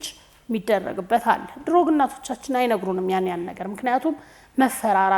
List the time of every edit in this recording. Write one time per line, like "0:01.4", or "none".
none